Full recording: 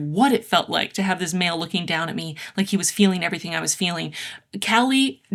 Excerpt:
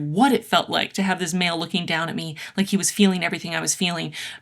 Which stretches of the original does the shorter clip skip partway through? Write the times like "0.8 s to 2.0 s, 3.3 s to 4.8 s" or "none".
none